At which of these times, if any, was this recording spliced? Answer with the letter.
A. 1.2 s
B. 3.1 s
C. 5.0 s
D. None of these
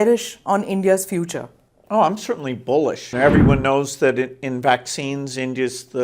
B